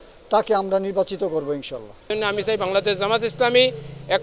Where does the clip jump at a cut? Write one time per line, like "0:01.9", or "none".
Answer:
0:02.1